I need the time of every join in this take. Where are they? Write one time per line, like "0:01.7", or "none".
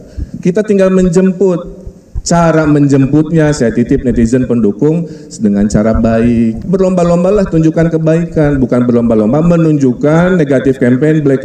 0:06.6